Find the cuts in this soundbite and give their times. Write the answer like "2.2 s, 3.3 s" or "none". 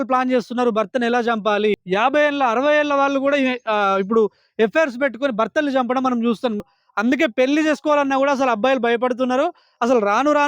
1.8 s, 6.6 s